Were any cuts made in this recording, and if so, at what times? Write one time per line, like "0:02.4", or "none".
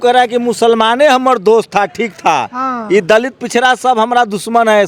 none